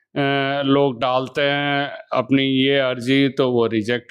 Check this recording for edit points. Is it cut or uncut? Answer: uncut